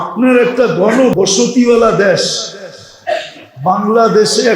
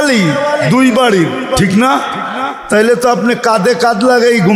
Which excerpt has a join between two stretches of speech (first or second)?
first